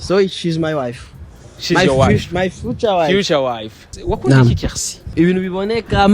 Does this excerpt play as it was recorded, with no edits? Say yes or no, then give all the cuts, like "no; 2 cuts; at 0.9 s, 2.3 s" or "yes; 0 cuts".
no; 2 cuts; at 3.9 s, 5.1 s